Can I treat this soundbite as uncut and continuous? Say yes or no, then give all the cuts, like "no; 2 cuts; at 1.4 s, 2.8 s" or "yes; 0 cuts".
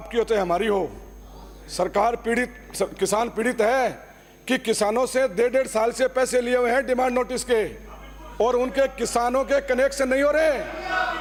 yes; 0 cuts